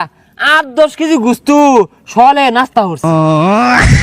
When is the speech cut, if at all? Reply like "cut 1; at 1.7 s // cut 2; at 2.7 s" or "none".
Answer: cut 1; at 3.1 s